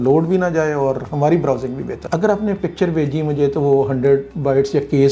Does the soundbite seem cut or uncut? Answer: cut